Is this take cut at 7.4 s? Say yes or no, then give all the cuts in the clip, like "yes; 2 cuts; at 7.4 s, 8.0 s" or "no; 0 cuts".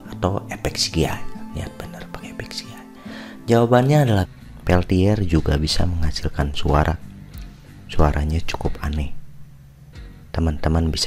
no; 1 cut; at 4.2 s